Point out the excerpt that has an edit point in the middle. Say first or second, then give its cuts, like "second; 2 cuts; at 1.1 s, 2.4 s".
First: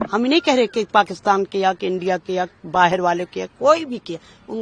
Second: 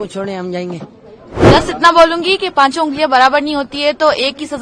second; 1 cut; at 1.2 s